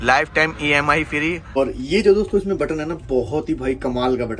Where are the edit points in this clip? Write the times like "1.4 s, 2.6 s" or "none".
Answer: 1.6 s